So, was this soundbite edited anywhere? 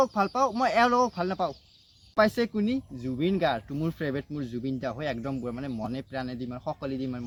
no; 0 cuts

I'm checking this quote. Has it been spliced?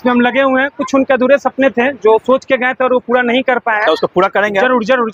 no; 0 cuts

